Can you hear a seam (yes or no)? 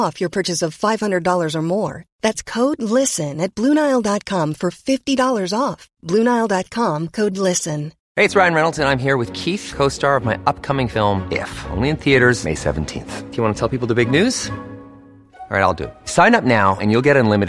yes